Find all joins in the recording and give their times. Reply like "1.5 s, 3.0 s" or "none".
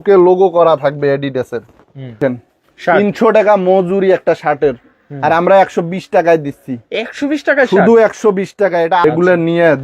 2.2 s, 9.0 s